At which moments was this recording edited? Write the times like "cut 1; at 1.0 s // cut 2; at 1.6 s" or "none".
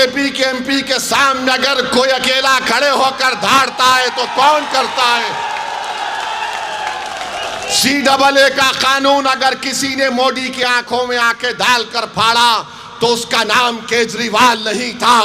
none